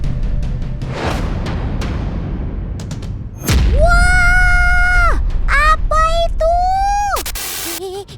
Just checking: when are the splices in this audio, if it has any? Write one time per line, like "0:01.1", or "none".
0:01.0